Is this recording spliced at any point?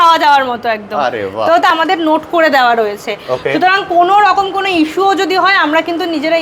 yes; 1 cut; at 1.7 s

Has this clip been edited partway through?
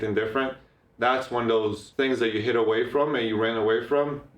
yes; 1 cut; at 1.8 s

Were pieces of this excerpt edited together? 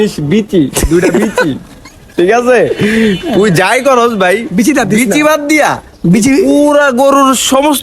no; 0 cuts

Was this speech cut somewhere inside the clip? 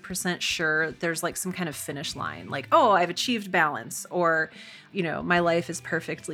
yes; 1 cut; at 4.8 s

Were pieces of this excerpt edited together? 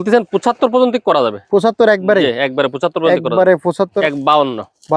yes; 1 cut; at 3.9 s

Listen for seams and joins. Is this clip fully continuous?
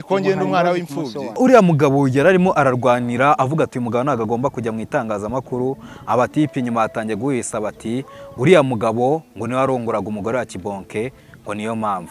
no; 1 cut; at 1.4 s

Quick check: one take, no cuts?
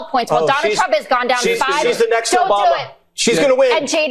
no; 1 cut; at 2.9 s

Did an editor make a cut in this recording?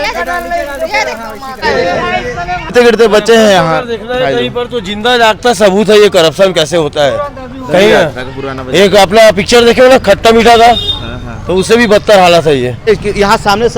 yes; 3 cuts; at 1.6 s, 2.7 s, 12.9 s

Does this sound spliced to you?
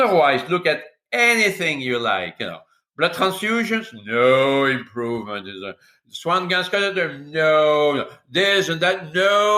no; 0 cuts

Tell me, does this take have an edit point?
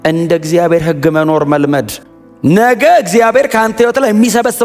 yes; 1 cut; at 2.0 s

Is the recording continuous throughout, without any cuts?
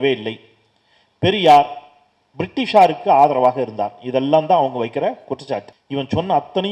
no; 1 cut; at 5.8 s

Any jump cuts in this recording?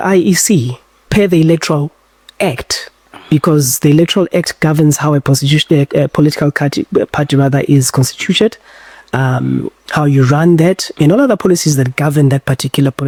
no; 0 cuts

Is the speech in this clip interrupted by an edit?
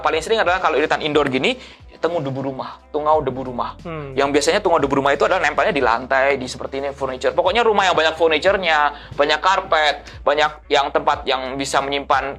no; 0 cuts

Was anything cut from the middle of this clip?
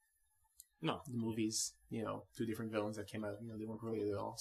yes; 1 cut; at 1.9 s

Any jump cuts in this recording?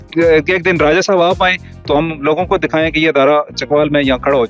no; 0 cuts

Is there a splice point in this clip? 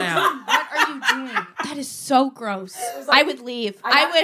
yes; 2 cuts; at 1.5 s, 3.0 s

